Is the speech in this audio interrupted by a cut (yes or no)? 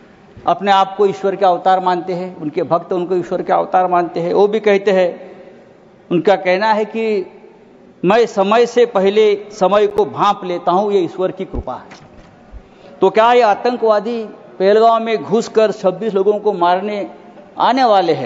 no